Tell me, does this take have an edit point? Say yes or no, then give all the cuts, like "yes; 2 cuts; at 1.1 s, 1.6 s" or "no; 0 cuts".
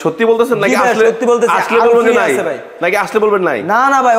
no; 0 cuts